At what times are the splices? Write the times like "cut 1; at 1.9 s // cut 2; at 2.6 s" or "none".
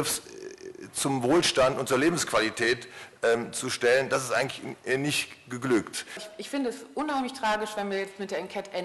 cut 1; at 6.3 s